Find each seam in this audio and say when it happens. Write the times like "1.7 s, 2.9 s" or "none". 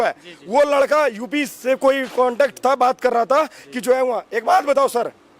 none